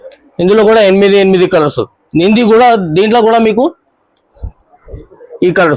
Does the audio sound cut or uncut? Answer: uncut